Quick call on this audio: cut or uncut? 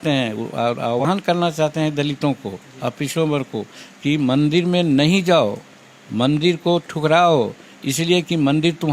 cut